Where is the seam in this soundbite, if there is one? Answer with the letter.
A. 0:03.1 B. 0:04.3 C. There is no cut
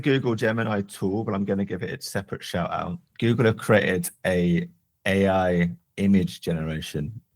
A